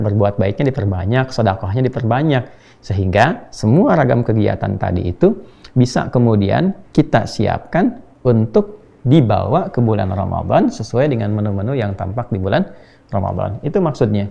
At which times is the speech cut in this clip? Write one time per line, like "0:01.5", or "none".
none